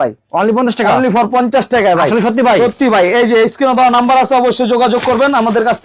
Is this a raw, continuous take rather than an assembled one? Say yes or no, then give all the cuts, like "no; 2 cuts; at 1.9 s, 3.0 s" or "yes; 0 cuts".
yes; 0 cuts